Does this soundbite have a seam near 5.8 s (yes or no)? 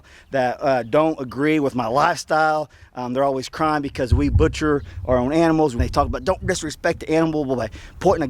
yes